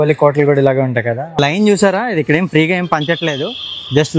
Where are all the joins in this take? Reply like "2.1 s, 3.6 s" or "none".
1.4 s